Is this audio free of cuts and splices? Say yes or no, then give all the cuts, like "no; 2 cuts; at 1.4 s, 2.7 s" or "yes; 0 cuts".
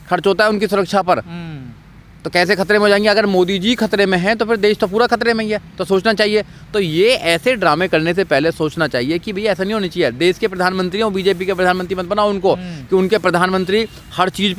yes; 0 cuts